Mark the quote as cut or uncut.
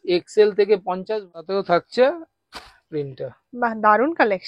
cut